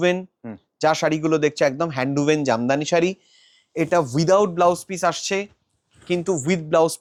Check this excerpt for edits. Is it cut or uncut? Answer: uncut